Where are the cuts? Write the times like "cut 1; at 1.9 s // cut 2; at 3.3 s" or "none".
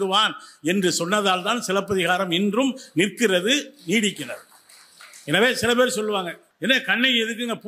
cut 1; at 6.4 s